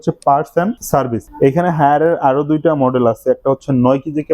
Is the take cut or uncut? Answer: cut